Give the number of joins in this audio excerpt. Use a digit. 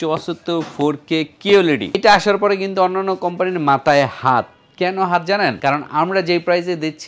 2